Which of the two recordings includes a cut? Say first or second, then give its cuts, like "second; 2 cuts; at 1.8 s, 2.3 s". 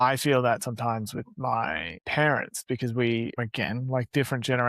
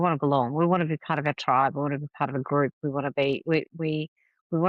first; 2 cuts; at 1.9 s, 3.3 s